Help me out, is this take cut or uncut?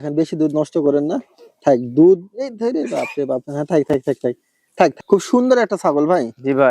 cut